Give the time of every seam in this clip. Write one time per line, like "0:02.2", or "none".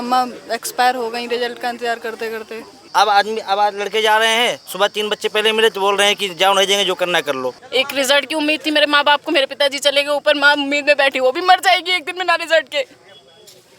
0:02.7
0:07.6